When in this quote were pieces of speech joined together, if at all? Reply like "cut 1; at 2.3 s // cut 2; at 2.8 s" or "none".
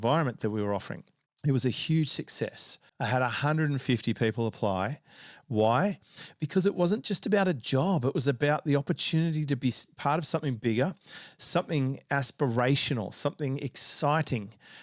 none